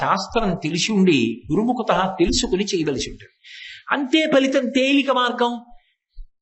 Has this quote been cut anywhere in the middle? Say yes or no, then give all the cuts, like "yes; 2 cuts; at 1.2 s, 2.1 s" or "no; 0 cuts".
no; 0 cuts